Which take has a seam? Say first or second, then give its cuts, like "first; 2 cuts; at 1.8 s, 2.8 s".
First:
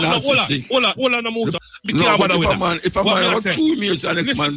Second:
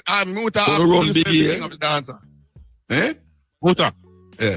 first; 1 cut; at 1.6 s